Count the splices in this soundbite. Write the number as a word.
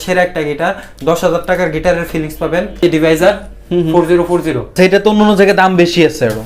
two